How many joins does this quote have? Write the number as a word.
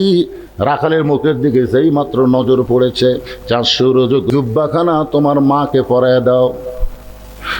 one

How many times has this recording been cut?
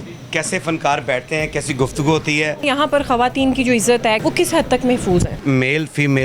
three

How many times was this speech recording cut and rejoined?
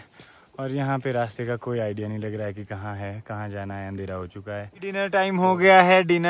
one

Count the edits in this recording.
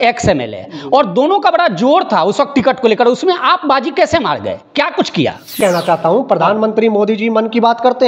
one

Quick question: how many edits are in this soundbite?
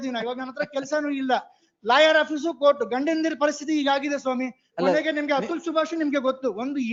zero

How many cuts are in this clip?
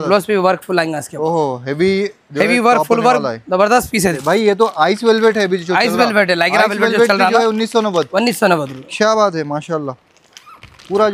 one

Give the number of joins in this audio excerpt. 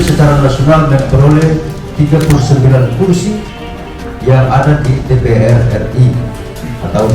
zero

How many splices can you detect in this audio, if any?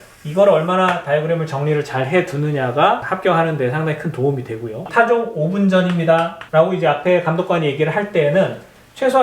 two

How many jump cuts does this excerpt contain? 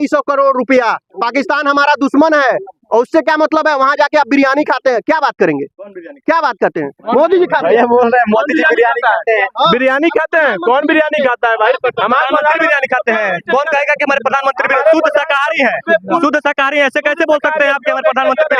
zero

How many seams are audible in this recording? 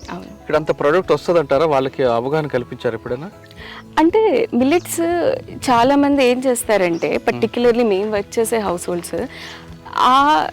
zero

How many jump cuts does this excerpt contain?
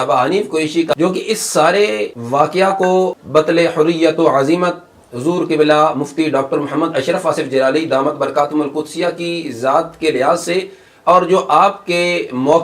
three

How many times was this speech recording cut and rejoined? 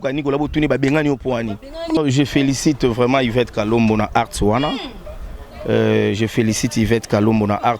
one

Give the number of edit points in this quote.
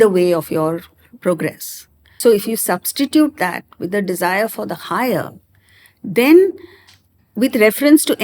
one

